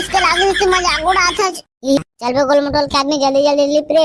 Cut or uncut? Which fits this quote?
cut